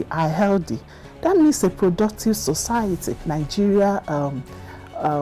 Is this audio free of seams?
no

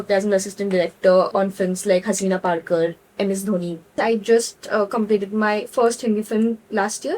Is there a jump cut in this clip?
yes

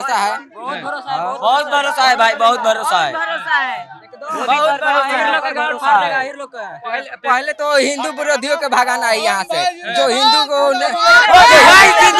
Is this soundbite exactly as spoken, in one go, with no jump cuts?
yes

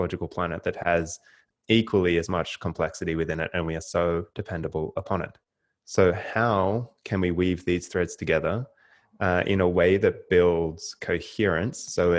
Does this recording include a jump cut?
yes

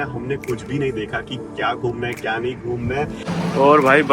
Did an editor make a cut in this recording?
yes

